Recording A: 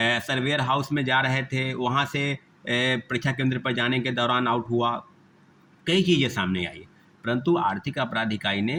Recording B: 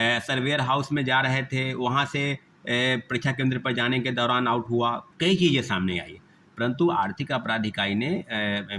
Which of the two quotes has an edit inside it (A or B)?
B